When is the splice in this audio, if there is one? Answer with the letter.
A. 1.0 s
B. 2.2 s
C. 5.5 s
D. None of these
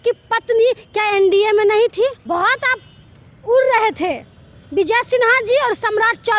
B